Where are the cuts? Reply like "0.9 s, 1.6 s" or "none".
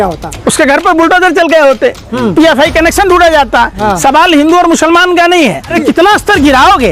5.8 s